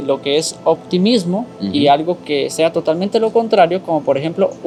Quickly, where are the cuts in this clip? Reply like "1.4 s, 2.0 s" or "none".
none